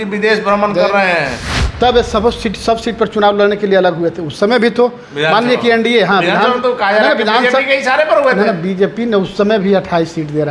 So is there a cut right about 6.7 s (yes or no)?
no